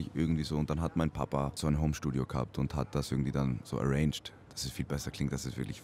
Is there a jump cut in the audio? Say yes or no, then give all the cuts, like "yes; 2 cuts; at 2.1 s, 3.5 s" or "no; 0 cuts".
yes; 1 cut; at 1.6 s